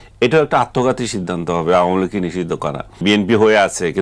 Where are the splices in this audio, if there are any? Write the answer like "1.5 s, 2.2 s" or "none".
3.0 s

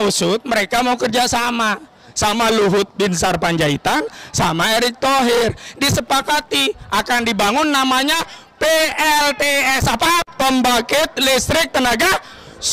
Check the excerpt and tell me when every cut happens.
none

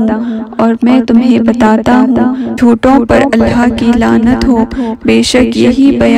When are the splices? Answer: 2.5 s

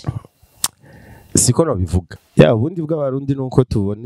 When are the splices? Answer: 2.1 s

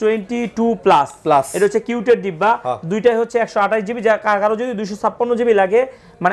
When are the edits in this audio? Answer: none

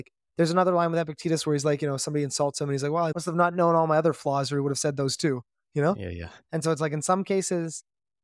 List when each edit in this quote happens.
3.1 s

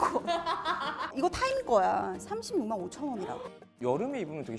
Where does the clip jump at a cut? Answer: 3.7 s

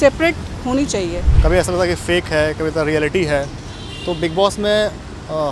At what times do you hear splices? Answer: 1.2 s

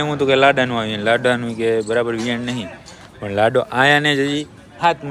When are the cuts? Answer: none

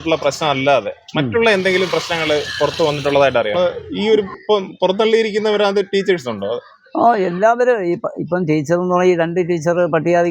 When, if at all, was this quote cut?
3.5 s

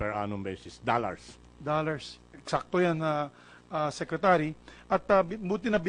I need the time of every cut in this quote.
none

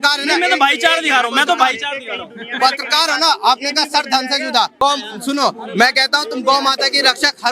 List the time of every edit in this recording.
4.7 s

